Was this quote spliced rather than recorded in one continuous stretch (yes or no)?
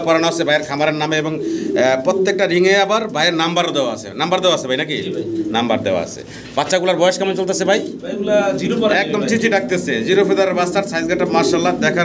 no